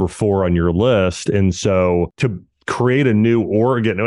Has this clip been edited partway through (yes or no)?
yes